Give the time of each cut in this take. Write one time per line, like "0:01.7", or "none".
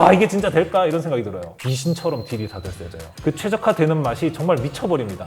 0:01.4
0:03.1